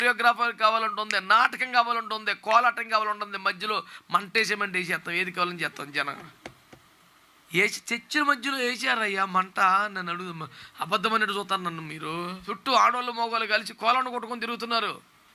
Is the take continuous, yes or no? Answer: no